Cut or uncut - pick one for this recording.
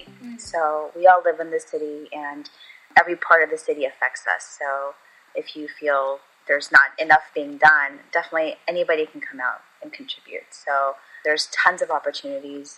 cut